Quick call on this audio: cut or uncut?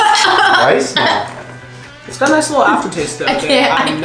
uncut